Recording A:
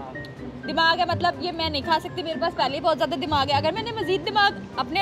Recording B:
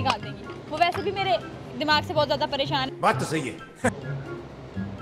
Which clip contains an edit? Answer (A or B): B